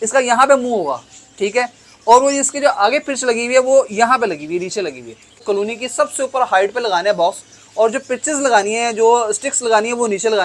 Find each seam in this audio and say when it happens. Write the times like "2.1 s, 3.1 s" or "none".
5.4 s